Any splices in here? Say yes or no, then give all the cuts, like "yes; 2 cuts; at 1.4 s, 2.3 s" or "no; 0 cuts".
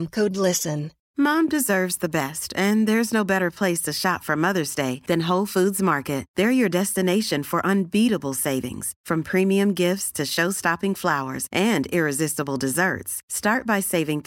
yes; 1 cut; at 1.0 s